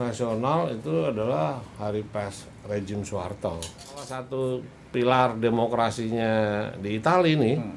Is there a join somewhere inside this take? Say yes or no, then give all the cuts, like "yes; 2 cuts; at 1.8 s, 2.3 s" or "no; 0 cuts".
yes; 1 cut; at 4.3 s